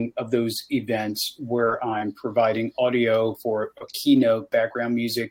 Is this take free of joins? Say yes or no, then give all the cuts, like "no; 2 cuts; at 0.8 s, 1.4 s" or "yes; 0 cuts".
yes; 0 cuts